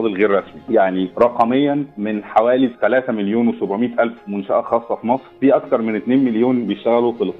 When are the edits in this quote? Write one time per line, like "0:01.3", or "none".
0:00.9
0:02.0
0:05.3